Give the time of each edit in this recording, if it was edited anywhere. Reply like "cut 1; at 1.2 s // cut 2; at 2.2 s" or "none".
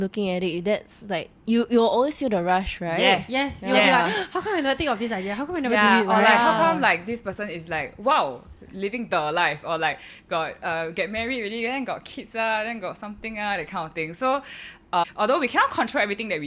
cut 1; at 15.0 s